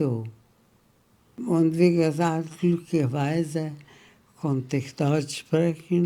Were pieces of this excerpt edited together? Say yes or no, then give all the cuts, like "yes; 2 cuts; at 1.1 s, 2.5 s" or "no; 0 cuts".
yes; 1 cut; at 1.4 s